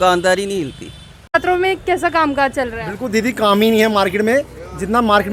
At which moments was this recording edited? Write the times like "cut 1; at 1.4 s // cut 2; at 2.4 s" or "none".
cut 1; at 1.3 s

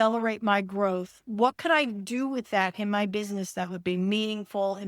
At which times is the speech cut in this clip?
none

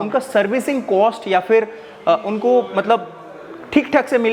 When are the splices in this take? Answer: none

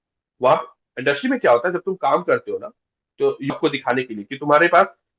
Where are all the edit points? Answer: cut 1; at 3.5 s

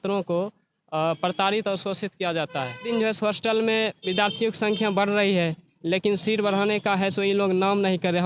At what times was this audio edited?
cut 1; at 2.9 s

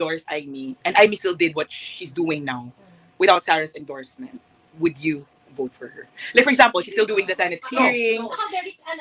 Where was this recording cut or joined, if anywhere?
none

